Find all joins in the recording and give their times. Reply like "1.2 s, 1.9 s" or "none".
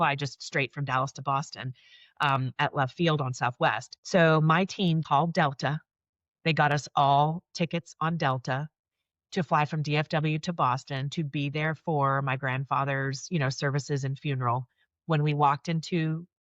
3.9 s, 5.0 s